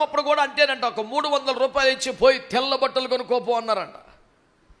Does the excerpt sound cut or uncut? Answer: uncut